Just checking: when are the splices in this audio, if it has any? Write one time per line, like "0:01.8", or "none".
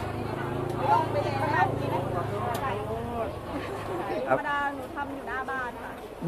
0:04.3